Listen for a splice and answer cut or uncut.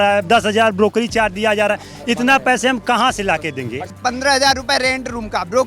cut